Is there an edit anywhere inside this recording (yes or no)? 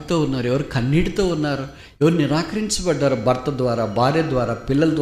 no